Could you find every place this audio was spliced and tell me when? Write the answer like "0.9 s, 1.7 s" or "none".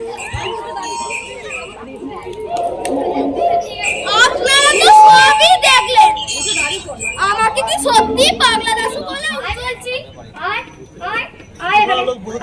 9.1 s